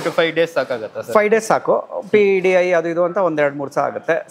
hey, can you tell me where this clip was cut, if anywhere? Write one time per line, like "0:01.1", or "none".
none